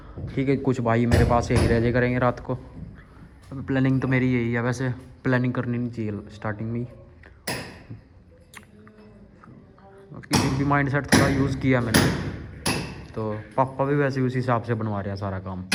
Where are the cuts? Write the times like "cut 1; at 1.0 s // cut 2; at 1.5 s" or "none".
none